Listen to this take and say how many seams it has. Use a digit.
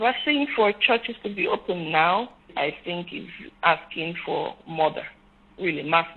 2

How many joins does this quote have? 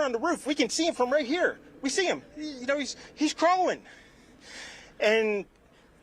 1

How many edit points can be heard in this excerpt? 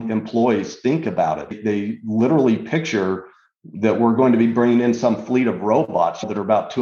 1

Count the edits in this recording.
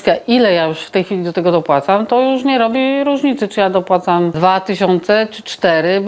1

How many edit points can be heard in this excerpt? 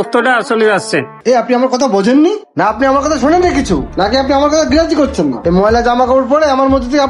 1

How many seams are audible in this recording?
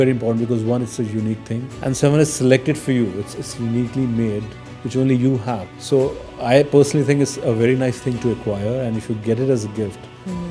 2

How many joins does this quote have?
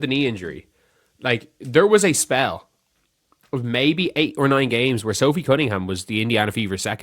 1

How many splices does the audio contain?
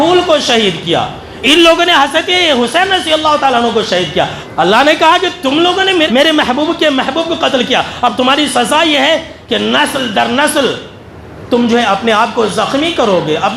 2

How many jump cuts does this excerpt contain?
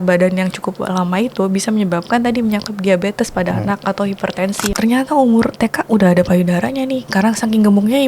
1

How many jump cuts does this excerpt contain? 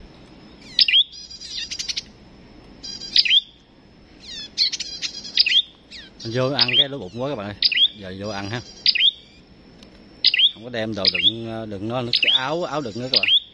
0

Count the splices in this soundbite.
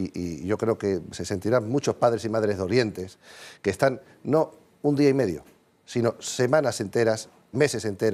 0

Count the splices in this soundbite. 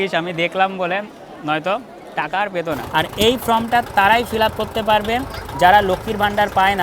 1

